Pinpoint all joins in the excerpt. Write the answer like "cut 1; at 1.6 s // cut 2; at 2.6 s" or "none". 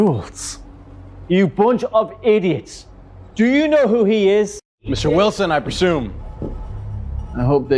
cut 1; at 4.8 s